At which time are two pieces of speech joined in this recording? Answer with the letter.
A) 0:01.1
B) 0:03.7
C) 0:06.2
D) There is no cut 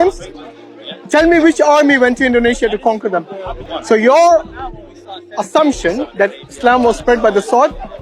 B